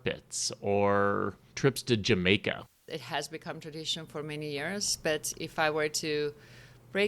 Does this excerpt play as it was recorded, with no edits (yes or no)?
no